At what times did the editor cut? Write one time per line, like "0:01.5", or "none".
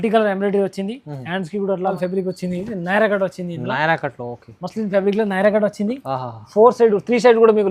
0:02.0